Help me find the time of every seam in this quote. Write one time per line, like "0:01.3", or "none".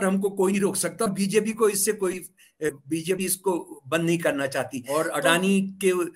0:04.8

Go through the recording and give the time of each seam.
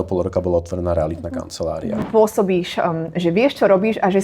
0:02.0

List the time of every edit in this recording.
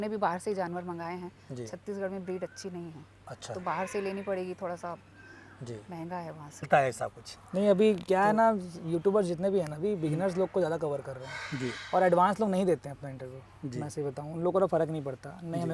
0:06.7

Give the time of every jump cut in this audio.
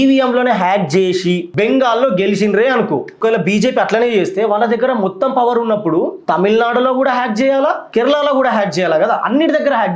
0:01.5
0:03.2
0:06.2
0:07.8

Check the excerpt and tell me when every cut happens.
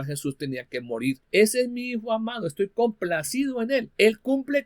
0:01.2
0:03.9

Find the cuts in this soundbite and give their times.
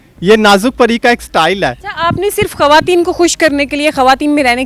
0:01.9

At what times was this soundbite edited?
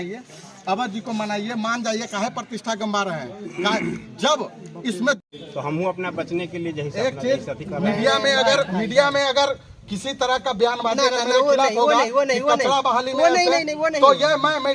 0:05.2

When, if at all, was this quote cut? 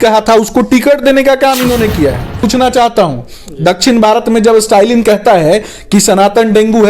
0:02.4

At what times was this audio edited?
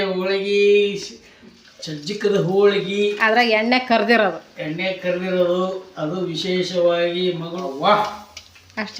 0:07.5

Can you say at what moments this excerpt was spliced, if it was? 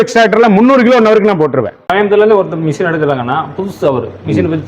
0:01.9

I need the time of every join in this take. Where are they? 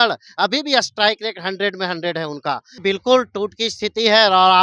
0:02.8

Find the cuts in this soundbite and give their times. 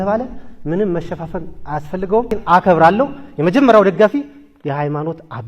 0:02.4

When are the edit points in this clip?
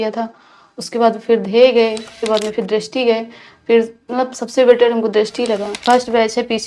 0:02.2
0:05.7

